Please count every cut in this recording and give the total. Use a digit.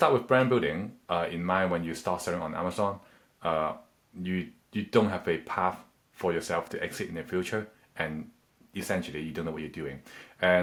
0